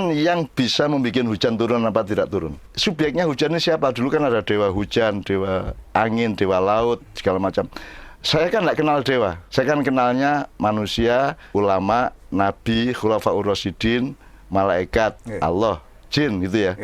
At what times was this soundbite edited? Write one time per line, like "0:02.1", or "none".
0:02.7
0:09.4
0:11.4